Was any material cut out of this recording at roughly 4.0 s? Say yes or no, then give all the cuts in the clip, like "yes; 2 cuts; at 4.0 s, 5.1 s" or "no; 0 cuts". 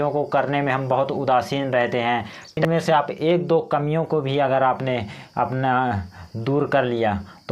no; 1 cut; at 2.6 s